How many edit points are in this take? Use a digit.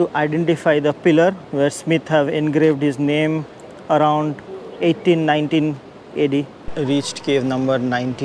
2